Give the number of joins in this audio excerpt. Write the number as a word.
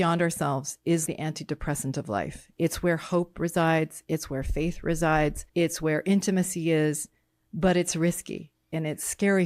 two